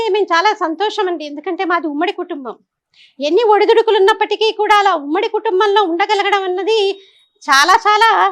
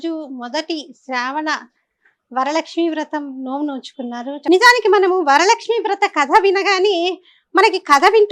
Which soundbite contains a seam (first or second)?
second